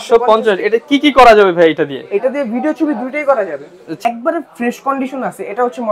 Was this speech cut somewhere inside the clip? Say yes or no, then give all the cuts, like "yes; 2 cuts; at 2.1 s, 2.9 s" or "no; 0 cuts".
yes; 1 cut; at 4.0 s